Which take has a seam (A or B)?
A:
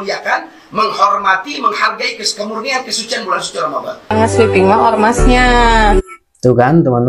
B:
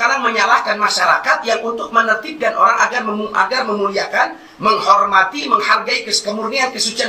A